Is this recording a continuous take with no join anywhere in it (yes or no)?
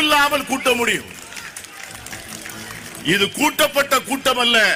yes